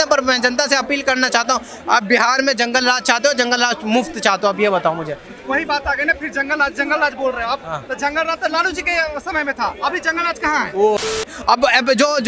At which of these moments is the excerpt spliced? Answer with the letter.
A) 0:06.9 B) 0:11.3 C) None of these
B